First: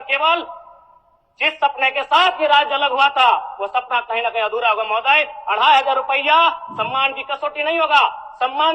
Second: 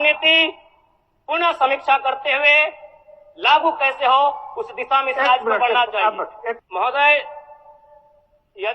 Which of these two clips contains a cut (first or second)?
second